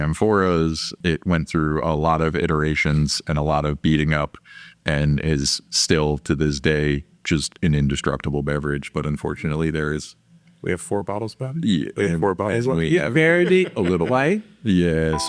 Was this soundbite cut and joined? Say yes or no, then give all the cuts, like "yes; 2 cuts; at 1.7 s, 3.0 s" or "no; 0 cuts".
yes; 1 cut; at 0.9 s